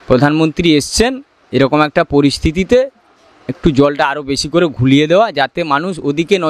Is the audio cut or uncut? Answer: uncut